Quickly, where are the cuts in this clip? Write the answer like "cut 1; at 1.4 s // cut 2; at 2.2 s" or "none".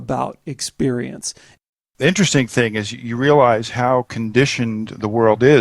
cut 1; at 1.6 s